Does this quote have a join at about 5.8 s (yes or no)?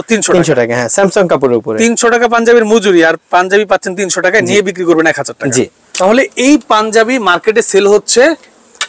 yes